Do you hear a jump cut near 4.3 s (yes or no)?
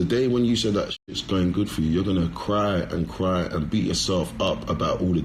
no